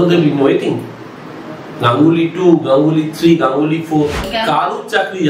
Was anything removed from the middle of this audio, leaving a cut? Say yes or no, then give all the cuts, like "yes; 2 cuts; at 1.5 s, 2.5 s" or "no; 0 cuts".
yes; 1 cut; at 4.2 s